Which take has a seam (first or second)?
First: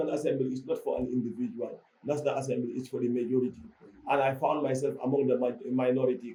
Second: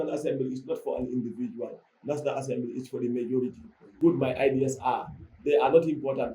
second